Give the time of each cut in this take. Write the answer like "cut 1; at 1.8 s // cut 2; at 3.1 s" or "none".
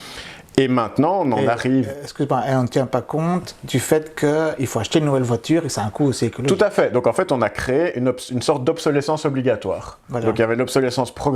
none

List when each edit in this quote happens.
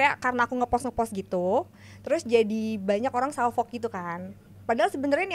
none

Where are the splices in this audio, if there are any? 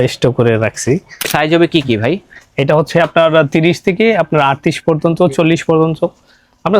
cut 1; at 1.3 s

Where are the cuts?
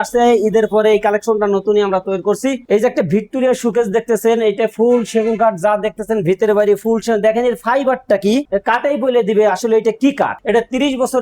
cut 1; at 2.6 s // cut 2; at 8.5 s // cut 3; at 10.4 s

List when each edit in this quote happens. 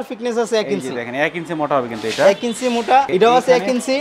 none

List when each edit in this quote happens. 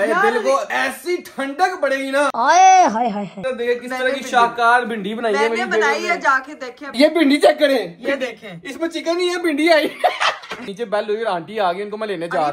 cut 1; at 3.3 s // cut 2; at 6.8 s // cut 3; at 10.7 s

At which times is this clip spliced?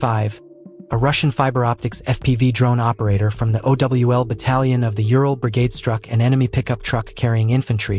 none

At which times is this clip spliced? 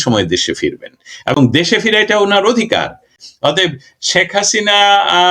cut 1; at 3.2 s

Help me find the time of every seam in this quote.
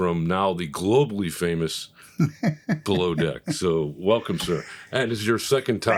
none

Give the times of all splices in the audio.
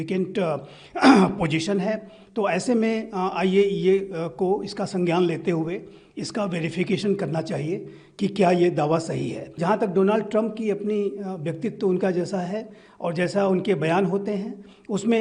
cut 1; at 9.5 s

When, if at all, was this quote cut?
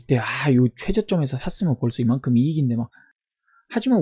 cut 1; at 3.0 s

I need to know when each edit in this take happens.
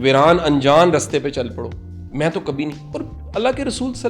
none

